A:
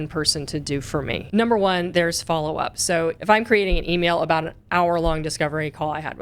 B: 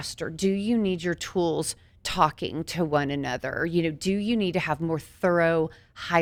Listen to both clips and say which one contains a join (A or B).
A